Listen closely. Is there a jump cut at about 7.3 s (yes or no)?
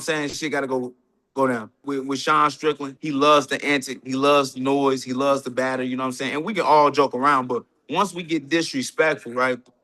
no